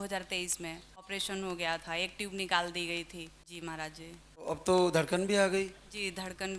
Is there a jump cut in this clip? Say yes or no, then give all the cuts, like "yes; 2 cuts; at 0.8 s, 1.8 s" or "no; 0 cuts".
yes; 3 cuts; at 1.1 s, 3.4 s, 4.5 s